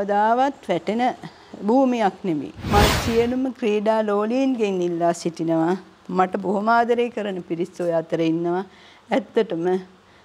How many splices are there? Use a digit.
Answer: 1